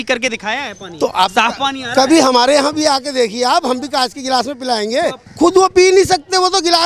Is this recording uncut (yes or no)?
no